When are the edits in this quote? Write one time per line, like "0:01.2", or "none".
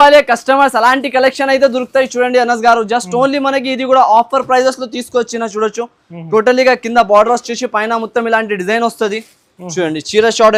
none